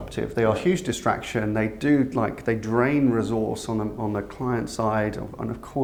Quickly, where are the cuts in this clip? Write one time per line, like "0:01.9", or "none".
none